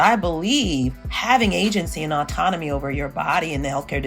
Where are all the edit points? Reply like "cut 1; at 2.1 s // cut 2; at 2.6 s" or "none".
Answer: cut 1; at 1.0 s